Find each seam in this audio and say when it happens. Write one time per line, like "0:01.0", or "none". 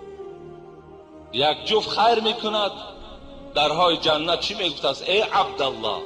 0:01.3